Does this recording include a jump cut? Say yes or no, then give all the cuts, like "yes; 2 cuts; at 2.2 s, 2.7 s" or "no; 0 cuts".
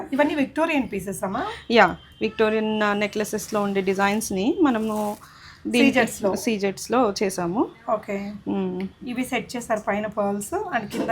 no; 0 cuts